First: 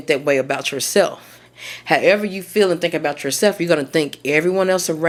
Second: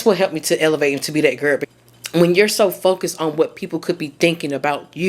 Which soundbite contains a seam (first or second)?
second